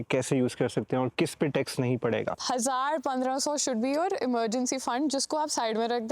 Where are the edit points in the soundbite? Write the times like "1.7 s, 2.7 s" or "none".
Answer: 2.4 s